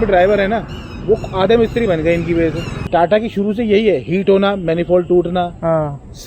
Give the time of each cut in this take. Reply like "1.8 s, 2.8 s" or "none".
2.7 s